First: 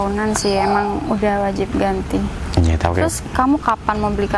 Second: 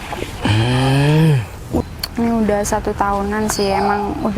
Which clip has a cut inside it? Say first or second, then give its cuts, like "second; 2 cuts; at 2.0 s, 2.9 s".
second; 1 cut; at 1.8 s